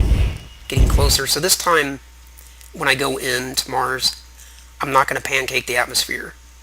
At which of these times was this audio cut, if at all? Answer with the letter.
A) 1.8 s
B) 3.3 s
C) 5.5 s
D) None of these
B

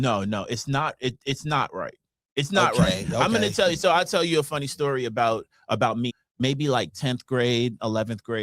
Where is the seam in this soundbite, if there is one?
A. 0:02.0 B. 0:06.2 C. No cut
B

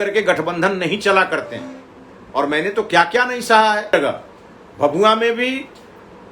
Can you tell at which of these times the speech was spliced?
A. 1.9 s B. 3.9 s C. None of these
B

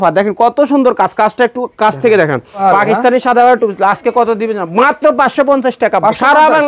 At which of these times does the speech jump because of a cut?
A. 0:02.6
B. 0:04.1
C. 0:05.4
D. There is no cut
A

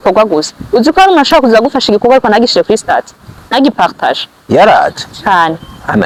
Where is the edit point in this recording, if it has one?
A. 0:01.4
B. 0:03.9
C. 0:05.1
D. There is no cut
D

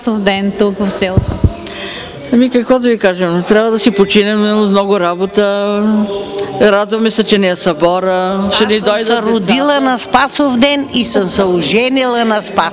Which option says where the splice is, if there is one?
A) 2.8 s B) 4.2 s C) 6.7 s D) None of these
D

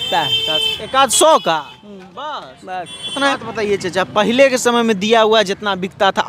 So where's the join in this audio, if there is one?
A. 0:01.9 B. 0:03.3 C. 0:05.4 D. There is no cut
B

